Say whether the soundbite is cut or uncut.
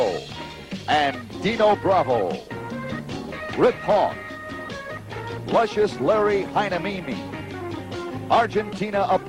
uncut